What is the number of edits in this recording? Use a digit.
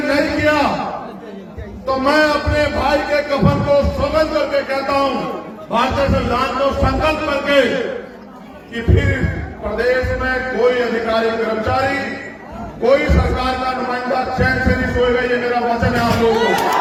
0